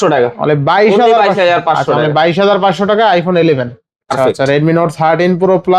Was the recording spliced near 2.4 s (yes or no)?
no